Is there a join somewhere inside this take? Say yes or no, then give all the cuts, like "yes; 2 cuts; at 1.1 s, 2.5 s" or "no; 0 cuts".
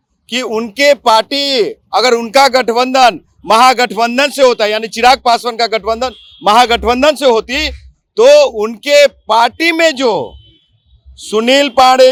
no; 0 cuts